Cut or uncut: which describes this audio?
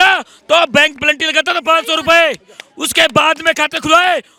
uncut